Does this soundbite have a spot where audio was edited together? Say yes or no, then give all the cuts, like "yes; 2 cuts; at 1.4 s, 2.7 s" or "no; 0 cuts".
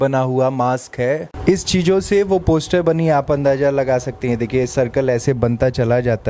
yes; 1 cut; at 1.3 s